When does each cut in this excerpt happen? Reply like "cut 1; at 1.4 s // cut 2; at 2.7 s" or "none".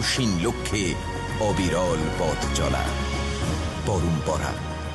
none